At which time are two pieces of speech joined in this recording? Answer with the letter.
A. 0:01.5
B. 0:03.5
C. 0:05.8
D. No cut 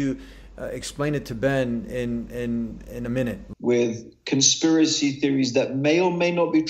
B